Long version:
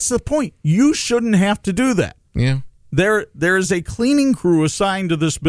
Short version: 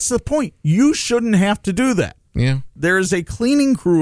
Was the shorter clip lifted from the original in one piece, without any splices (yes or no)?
no